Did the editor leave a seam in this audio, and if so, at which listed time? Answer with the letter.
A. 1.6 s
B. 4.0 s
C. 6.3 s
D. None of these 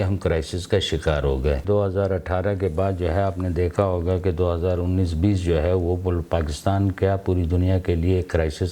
A